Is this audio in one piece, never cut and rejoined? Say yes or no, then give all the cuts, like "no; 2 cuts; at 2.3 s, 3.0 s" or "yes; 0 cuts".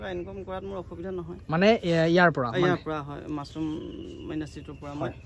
yes; 0 cuts